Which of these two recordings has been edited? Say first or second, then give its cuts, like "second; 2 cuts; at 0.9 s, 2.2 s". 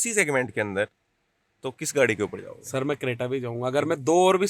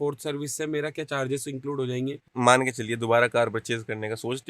second; 1 cut; at 2.2 s